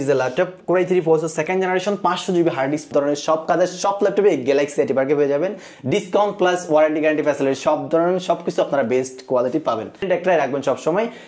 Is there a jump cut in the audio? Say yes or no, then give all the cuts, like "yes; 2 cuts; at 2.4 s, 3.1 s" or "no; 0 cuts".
yes; 2 cuts; at 2.9 s, 10.0 s